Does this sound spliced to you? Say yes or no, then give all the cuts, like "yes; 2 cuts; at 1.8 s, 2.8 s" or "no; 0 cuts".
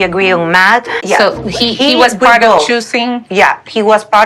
yes; 1 cut; at 0.9 s